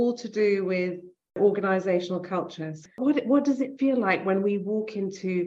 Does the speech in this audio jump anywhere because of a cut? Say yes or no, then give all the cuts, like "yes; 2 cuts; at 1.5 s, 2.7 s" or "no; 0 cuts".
yes; 2 cuts; at 1.4 s, 2.9 s